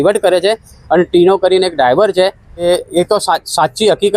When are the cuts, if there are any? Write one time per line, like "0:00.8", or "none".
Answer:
0:02.5